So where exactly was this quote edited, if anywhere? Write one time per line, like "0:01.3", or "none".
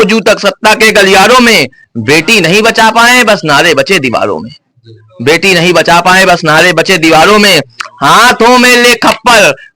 none